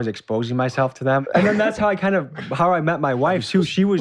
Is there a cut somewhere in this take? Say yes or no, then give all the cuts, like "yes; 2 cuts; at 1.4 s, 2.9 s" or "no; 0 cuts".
yes; 1 cut; at 1.2 s